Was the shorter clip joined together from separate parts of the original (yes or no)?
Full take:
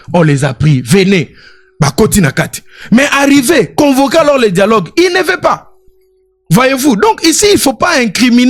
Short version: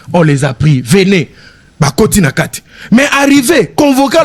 no